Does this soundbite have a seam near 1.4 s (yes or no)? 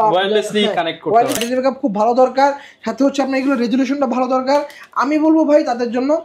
yes